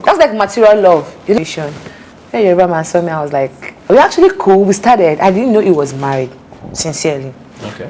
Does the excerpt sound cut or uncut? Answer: cut